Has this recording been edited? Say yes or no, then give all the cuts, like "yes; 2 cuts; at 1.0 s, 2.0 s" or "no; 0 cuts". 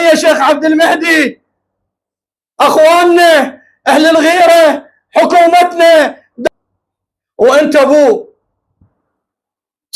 yes; 1 cut; at 6.3 s